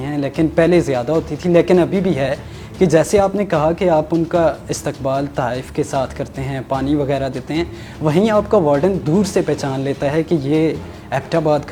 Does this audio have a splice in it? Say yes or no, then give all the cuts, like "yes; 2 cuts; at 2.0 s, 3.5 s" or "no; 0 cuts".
no; 0 cuts